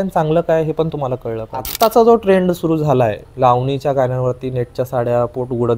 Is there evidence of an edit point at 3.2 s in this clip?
yes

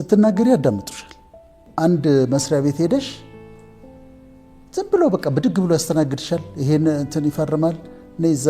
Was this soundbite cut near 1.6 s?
yes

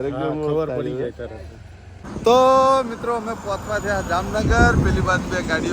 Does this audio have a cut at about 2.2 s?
yes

